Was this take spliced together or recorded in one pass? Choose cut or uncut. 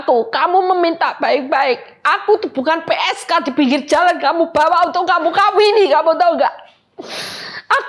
uncut